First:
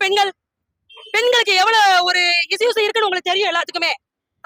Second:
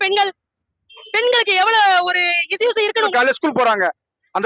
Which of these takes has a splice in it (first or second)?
second